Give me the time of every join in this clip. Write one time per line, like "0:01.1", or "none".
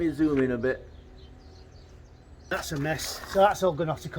0:02.5